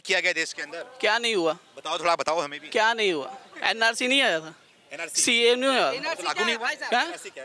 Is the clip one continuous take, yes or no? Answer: yes